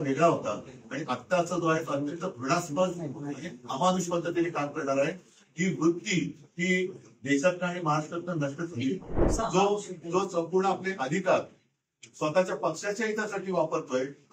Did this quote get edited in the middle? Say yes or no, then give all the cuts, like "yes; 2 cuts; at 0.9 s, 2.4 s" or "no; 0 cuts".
yes; 1 cut; at 9.2 s